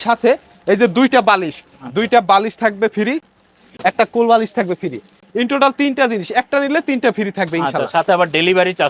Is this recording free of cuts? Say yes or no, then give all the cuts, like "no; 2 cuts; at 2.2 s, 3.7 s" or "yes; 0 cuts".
yes; 0 cuts